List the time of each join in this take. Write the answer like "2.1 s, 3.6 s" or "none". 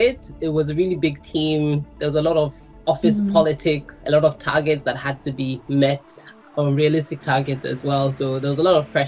3.9 s